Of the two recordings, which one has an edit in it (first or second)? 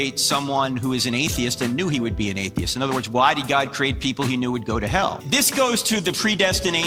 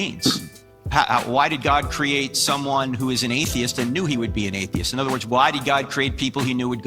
second